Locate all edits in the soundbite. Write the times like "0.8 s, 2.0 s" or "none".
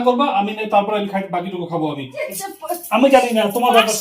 2.2 s